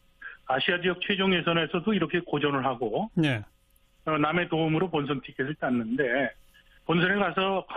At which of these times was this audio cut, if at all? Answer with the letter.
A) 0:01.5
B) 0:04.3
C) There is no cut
B